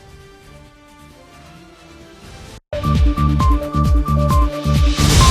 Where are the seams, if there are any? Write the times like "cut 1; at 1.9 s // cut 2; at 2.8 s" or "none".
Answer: cut 1; at 2.6 s